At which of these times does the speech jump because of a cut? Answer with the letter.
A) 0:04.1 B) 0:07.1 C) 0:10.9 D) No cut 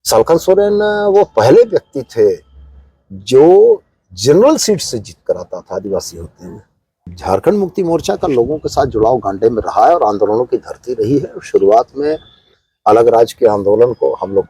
B